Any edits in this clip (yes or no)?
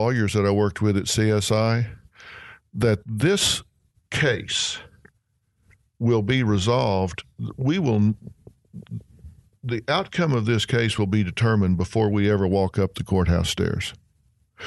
no